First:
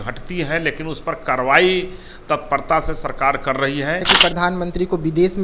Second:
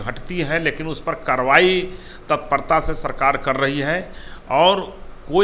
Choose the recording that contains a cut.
first; 1 cut; at 4.1 s

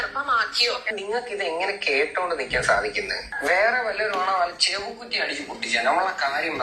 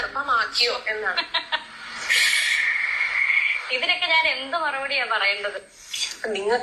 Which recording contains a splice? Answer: first; 2 cuts; at 0.9 s, 3.2 s

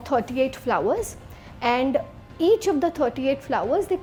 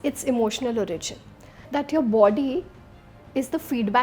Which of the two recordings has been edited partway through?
second; 1 cut; at 1.6 s

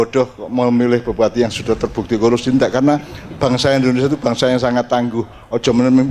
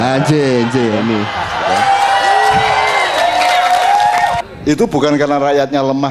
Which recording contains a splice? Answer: second; 1 cut; at 4.5 s

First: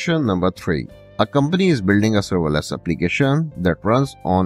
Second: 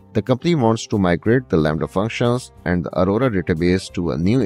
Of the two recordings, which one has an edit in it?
first; 1 cut; at 1.0 s

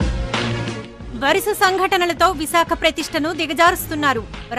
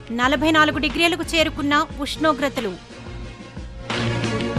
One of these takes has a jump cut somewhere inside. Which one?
first; 1 cut; at 0.9 s

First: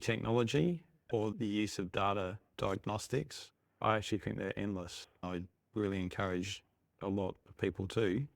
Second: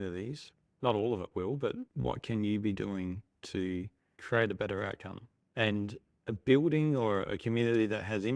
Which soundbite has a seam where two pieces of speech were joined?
first; 1 cut; at 5.2 s

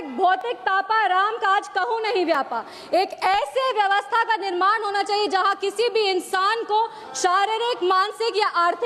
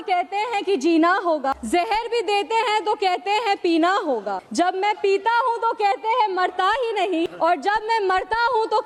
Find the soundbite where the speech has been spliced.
second; 3 cuts; at 1.6 s, 4.4 s, 7.3 s

